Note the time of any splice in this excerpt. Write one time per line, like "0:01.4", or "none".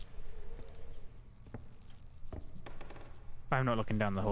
0:01.1

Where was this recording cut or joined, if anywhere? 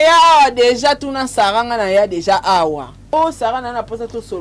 0:03.1

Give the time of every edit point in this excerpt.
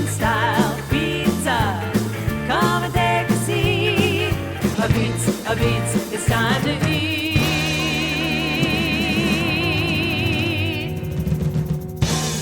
none

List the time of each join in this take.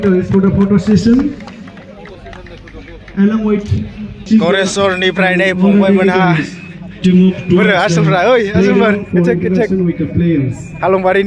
0:04.2

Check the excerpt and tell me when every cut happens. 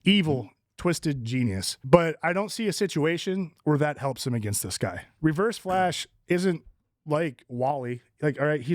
0:01.7
0:05.1

